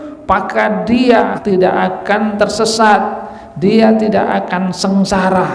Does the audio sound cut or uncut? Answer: cut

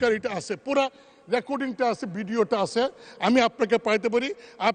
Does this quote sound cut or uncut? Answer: uncut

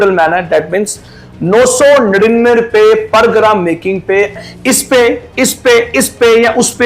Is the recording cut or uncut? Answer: cut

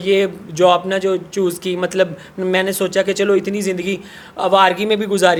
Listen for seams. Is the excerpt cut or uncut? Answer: uncut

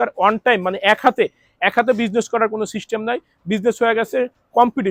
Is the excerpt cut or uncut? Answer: uncut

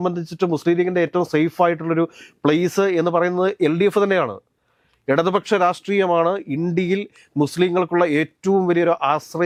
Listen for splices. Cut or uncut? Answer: uncut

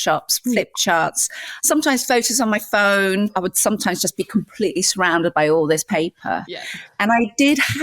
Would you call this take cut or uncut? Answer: cut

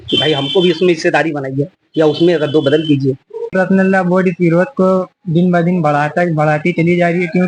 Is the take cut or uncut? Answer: cut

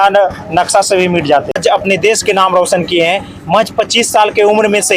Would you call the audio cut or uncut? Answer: cut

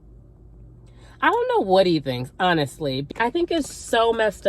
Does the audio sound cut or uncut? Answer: cut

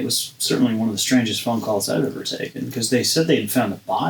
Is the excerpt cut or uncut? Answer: uncut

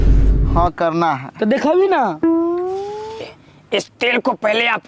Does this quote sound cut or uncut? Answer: cut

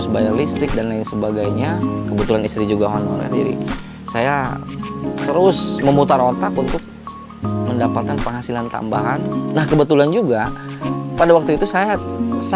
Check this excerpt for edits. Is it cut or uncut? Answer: cut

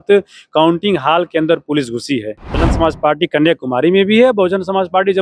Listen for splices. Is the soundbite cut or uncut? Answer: cut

